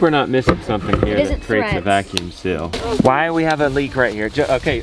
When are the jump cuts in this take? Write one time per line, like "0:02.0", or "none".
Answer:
0:02.7